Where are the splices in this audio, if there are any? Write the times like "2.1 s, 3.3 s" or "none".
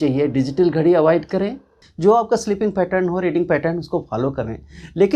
1.8 s

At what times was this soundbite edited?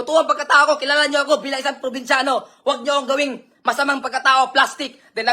none

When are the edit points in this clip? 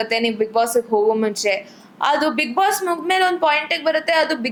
none

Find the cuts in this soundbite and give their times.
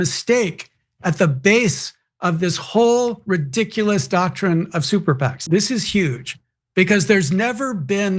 5.4 s

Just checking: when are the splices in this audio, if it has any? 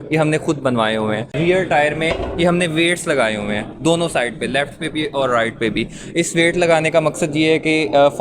1.3 s

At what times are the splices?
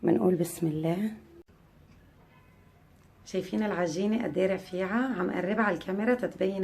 1.4 s

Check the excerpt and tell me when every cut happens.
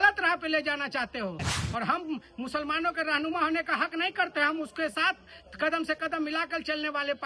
1.5 s

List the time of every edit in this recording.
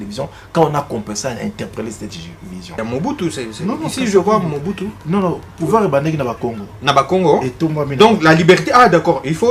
2.8 s

